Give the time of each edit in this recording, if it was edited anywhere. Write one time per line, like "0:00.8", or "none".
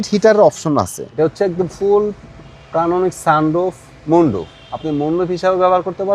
0:01.0